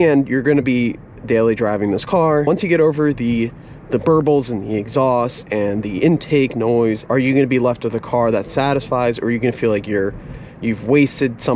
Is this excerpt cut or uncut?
cut